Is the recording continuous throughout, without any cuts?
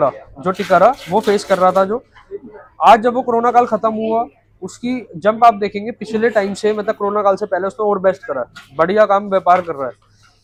yes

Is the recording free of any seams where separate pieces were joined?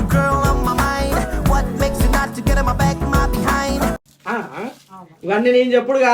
yes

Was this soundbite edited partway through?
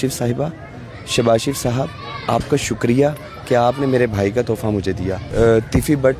yes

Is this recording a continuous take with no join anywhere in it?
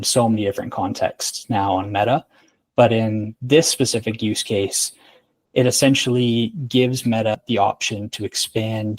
no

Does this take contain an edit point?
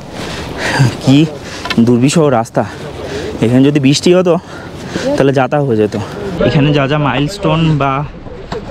yes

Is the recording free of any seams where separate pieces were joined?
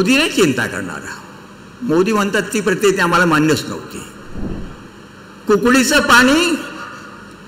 no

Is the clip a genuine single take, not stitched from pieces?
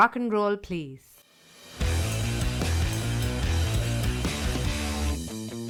yes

